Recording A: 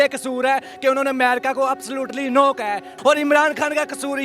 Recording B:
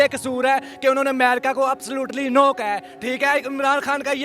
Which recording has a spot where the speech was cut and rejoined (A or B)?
A